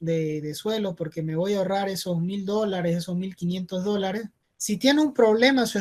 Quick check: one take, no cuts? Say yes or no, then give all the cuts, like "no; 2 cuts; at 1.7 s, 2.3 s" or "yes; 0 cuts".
yes; 0 cuts